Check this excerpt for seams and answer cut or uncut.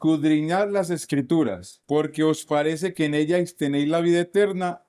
uncut